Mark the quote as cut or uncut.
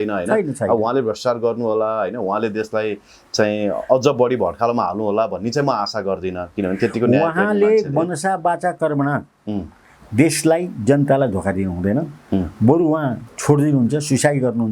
uncut